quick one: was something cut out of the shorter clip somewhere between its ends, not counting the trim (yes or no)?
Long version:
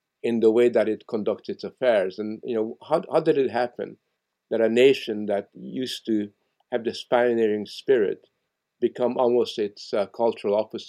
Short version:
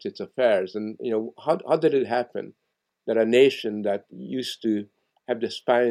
no